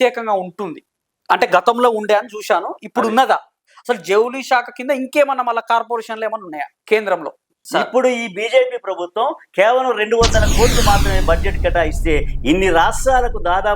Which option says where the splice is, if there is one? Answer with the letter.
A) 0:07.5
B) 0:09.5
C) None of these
A